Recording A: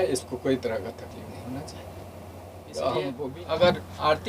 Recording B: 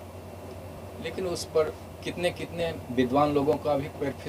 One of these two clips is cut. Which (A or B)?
A